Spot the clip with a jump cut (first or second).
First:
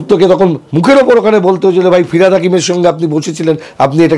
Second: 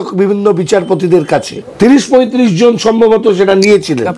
second